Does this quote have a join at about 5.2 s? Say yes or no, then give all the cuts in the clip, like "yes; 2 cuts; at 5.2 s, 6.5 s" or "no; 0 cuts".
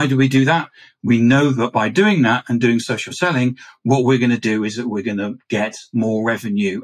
no; 0 cuts